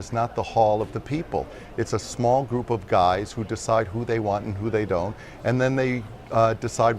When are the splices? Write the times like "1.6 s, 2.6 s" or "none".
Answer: none